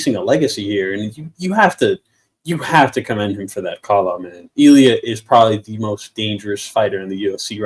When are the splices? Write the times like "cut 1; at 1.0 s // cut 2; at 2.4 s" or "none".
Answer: none